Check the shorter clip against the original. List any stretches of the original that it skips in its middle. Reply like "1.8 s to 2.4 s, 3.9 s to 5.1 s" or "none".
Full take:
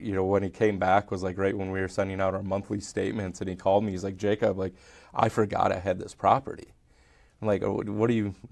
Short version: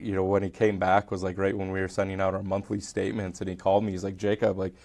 none